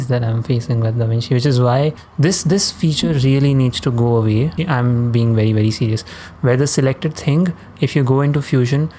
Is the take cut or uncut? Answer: cut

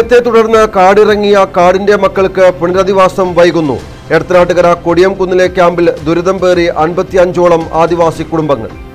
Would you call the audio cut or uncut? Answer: uncut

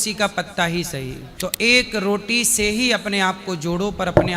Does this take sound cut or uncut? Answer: cut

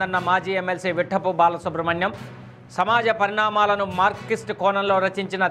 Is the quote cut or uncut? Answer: uncut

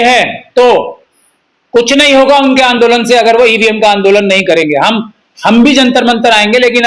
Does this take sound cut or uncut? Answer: uncut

